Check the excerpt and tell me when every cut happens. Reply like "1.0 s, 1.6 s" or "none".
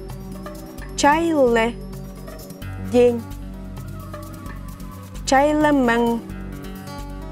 1.0 s, 3.7 s, 5.2 s

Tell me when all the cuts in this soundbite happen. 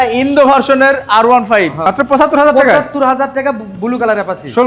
1.8 s

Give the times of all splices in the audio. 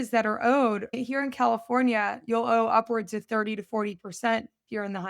0.9 s

